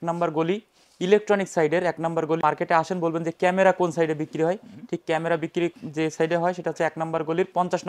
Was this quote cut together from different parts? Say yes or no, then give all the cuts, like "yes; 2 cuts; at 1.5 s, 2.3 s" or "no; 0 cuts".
yes; 1 cut; at 2.4 s